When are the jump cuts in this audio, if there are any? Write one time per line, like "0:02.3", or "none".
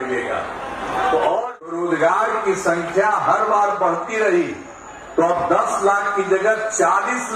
0:01.7